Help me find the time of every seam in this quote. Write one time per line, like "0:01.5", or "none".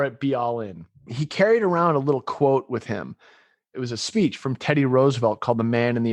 0:01.2
0:03.7

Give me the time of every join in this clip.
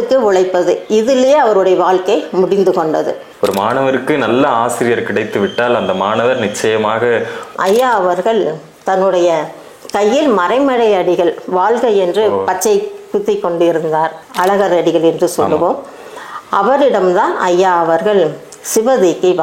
0:03.2
0:07.4
0:14.2

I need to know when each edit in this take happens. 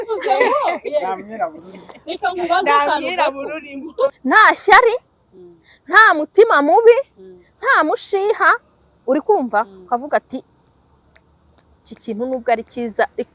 0:04.2

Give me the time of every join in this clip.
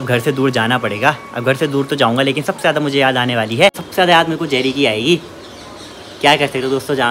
0:03.8

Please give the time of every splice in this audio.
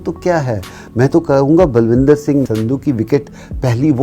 0:02.5

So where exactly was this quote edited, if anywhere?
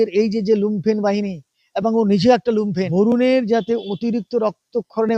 0:02.7

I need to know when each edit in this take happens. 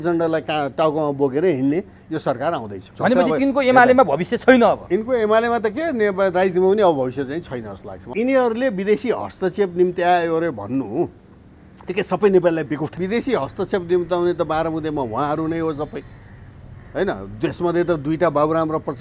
0:02.9
0:08.0
0:13.0

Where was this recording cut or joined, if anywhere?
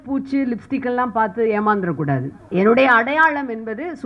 0:02.4

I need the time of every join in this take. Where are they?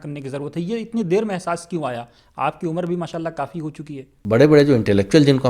0:04.1

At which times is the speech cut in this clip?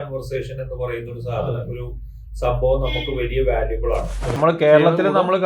0:04.4

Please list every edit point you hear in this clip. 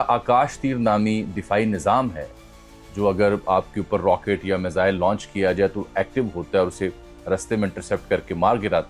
none

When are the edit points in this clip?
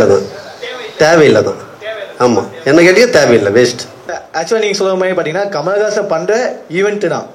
0:04.2

